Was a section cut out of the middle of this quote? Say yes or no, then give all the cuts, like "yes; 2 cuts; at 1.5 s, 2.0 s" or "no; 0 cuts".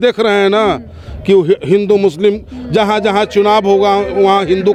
no; 0 cuts